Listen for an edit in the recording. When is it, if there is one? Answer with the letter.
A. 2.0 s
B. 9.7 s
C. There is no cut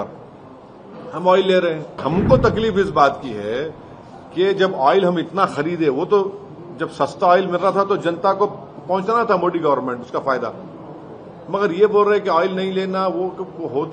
A